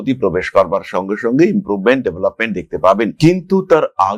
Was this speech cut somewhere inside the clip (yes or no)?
no